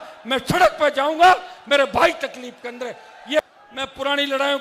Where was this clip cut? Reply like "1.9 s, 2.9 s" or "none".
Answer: 3.5 s